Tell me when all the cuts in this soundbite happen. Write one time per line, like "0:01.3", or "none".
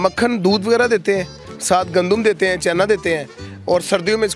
none

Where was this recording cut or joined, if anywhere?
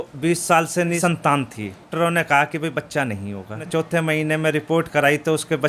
0:01.0
0:01.9
0:03.6

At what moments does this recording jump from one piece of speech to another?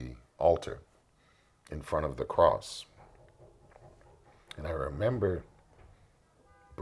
none

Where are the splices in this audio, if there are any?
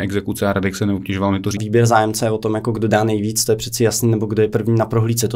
0:01.6

